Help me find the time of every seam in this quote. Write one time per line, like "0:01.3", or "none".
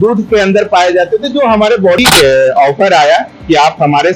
0:02.0